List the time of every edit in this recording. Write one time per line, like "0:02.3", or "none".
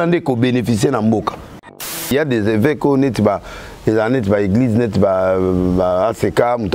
0:02.1